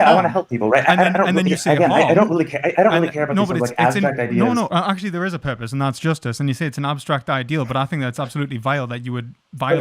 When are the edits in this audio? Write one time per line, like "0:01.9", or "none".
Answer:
0:04.7